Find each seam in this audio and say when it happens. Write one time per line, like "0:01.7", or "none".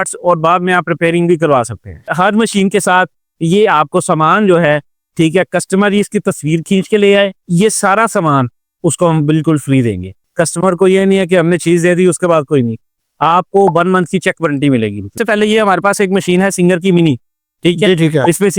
0:02.1
0:10.2
0:15.2